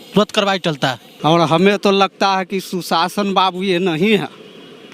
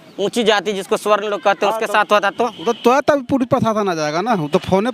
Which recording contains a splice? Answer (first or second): first